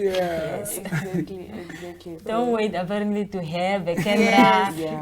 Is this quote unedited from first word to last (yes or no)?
yes